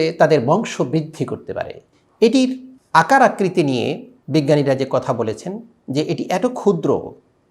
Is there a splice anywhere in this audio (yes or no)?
yes